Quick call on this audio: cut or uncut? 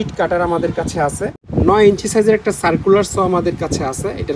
cut